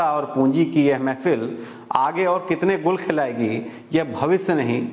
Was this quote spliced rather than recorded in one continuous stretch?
no; 0 cuts

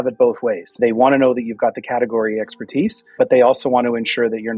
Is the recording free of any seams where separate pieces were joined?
no; 2 cuts; at 0.8 s, 3.1 s

